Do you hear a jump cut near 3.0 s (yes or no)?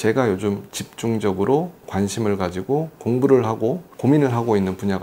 no